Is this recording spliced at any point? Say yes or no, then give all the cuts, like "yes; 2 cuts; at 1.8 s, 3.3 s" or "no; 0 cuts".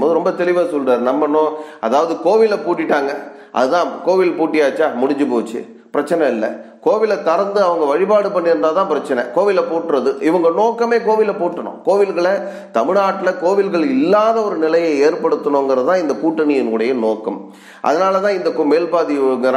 no; 0 cuts